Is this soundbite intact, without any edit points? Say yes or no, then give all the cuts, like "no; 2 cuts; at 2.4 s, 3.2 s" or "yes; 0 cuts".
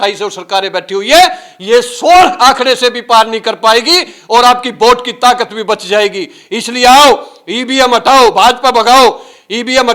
yes; 0 cuts